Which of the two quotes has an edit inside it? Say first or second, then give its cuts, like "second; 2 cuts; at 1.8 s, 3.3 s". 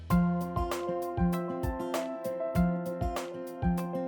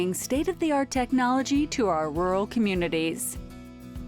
second; 1 cut; at 3.2 s